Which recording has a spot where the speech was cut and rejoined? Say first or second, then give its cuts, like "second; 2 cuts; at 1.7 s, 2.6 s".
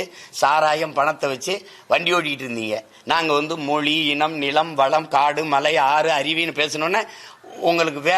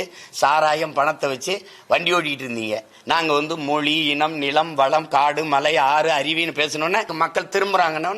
second; 1 cut; at 7.1 s